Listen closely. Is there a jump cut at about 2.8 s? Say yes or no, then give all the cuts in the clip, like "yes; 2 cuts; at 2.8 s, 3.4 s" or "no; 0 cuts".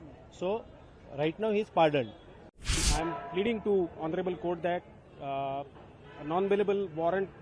yes; 1 cut; at 2.8 s